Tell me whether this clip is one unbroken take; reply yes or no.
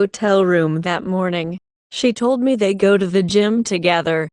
no